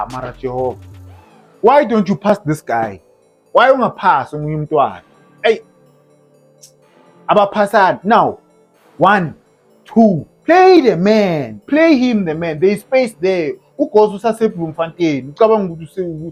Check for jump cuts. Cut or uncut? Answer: uncut